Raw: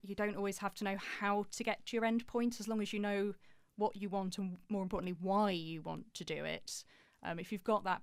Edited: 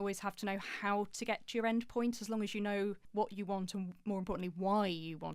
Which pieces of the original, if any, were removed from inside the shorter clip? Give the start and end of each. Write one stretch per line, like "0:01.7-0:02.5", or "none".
0:03.4-0:03.7